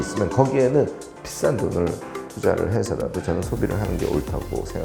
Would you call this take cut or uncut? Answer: uncut